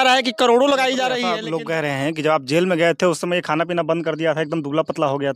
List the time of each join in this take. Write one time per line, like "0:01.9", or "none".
0:01.3